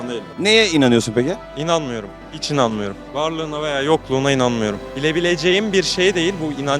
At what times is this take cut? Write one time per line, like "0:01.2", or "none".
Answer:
0:01.5
0:04.9